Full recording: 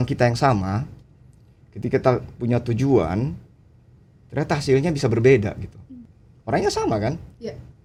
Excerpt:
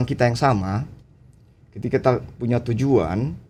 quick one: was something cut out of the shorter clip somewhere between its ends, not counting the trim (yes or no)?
no